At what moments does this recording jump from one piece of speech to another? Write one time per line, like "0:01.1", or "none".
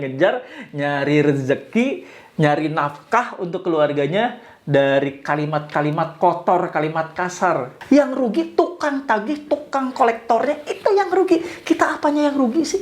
0:07.7